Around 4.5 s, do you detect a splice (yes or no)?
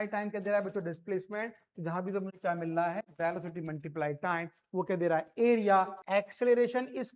no